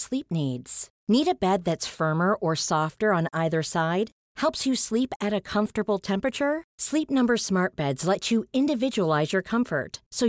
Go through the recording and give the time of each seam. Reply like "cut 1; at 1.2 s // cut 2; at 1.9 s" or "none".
none